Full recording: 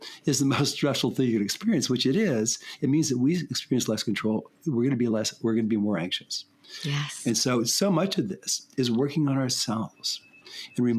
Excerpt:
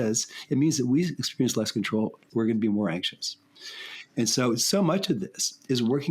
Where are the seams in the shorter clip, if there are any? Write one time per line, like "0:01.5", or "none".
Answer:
0:02.2